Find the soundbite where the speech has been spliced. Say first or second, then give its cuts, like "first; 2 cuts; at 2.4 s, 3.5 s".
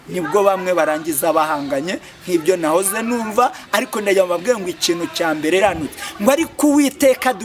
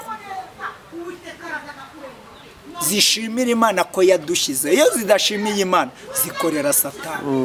first; 1 cut; at 5.6 s